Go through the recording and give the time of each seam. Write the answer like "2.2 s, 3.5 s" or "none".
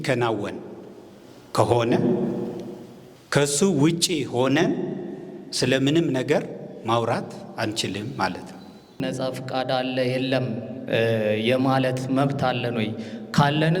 9.0 s